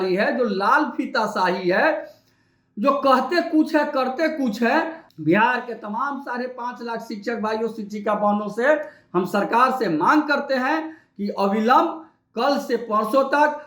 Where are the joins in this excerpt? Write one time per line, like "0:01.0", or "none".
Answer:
0:05.0